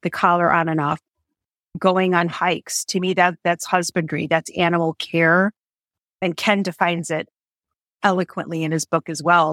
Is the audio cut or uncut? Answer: cut